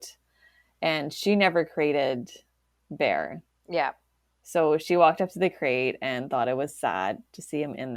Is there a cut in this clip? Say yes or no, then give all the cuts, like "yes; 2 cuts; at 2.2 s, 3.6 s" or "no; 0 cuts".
no; 0 cuts